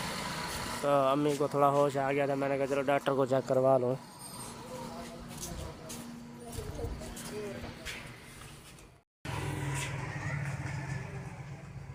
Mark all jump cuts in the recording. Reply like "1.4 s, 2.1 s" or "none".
none